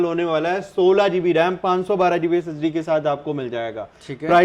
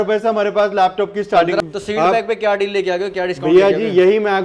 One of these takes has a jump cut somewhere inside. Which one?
second; 1 cut; at 1.6 s

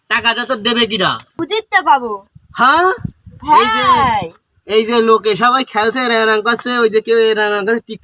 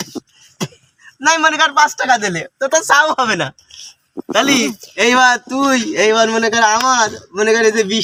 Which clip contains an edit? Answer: first; 1 cut; at 1.3 s

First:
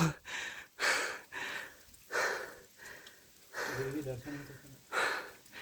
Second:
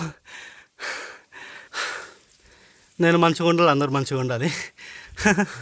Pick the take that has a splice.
second; 1 cut; at 1.6 s

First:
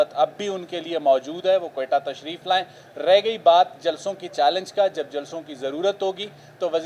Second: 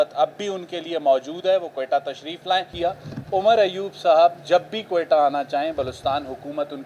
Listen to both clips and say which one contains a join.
second; 1 cut; at 2.7 s

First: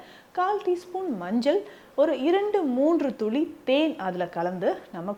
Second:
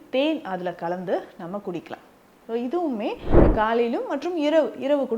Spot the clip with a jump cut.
second; 1 cut; at 3.3 s

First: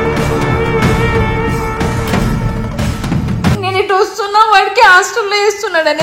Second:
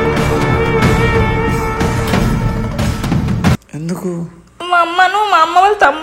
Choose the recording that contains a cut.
first; 1 cut; at 3.6 s

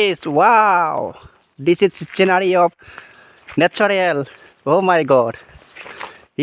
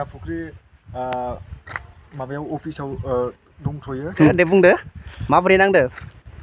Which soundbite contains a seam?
second; 1 cut; at 4.3 s

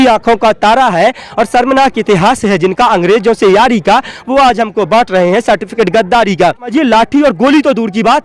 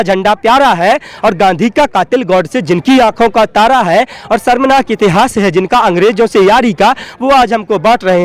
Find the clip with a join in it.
first; 1 cut; at 6.7 s

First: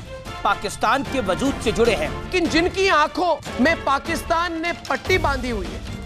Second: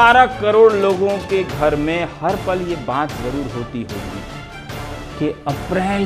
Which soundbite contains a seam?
first; 1 cut; at 2.2 s

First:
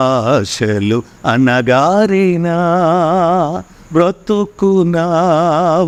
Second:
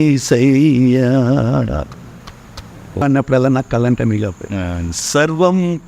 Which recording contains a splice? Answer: second; 1 cut; at 3.0 s

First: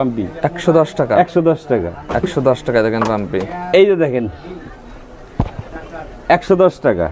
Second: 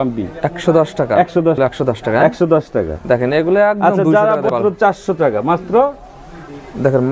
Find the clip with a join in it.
second; 2 cuts; at 1.6 s, 4.5 s

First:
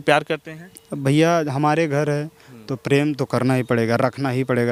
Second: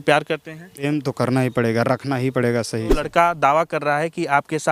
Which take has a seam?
second; 2 cuts; at 0.9 s, 3.0 s

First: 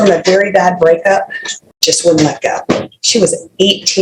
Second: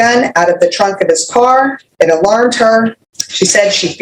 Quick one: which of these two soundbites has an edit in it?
second; 2 cuts; at 1.8 s, 3.0 s

